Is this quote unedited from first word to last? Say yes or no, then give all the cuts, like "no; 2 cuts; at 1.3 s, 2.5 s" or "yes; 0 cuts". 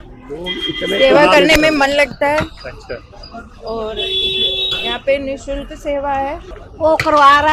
no; 1 cut; at 6.5 s